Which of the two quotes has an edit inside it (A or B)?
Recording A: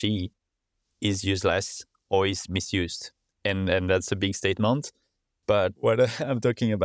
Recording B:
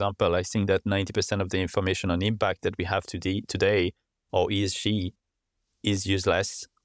A